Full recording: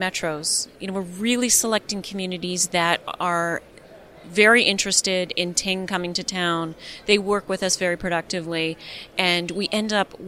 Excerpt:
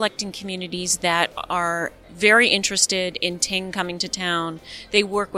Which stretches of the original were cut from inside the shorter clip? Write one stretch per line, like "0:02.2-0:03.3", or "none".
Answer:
0:03.7-0:04.2